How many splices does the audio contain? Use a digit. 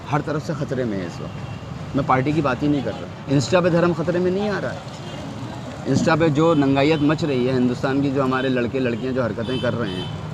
1